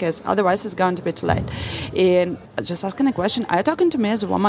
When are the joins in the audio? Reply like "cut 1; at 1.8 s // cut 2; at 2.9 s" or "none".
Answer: cut 1; at 2.4 s